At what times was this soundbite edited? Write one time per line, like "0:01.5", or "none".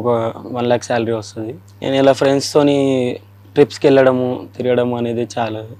none